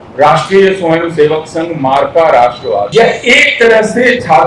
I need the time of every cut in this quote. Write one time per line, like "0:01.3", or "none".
0:02.9